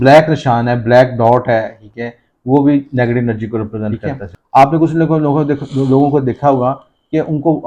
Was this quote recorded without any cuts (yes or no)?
no